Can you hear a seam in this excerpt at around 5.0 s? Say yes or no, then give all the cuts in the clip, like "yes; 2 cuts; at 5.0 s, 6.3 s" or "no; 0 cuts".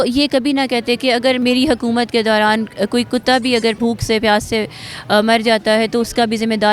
no; 2 cuts; at 1.4 s, 3.8 s